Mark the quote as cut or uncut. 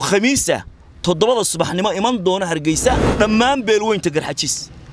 cut